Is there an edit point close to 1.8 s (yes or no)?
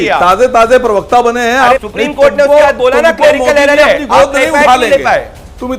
yes